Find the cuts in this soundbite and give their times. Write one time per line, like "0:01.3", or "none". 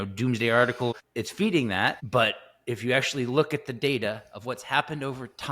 0:00.9
0:02.0